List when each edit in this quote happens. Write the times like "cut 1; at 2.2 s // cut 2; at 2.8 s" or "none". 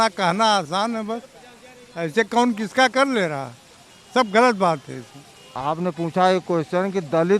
cut 1; at 5.6 s

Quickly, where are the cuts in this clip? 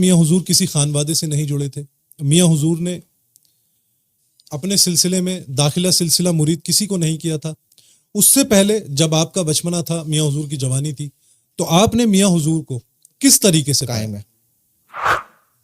cut 1; at 13.9 s

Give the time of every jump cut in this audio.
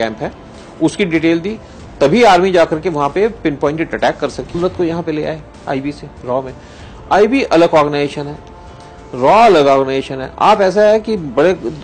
cut 1; at 4.6 s

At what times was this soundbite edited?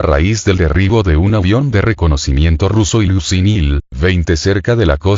none

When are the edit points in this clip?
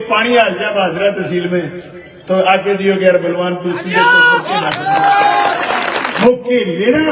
cut 1; at 6.1 s

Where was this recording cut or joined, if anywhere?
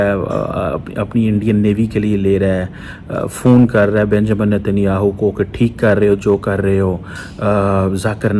cut 1; at 2.1 s

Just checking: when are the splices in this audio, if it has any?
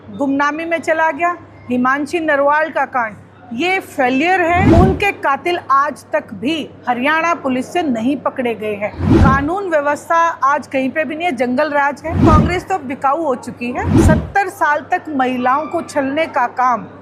cut 1; at 4.7 s // cut 2; at 9.1 s // cut 3; at 12.2 s // cut 4; at 13.9 s

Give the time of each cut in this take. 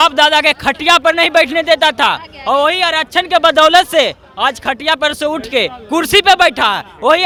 none

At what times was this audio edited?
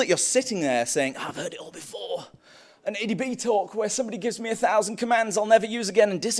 none

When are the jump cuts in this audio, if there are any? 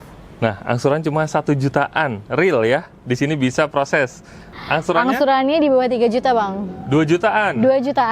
cut 1; at 4.5 s

